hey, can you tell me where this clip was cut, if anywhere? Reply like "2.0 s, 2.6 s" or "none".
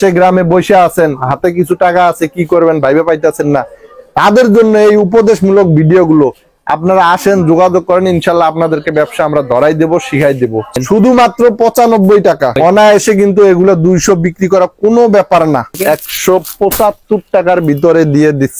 10.8 s, 12.6 s, 15.7 s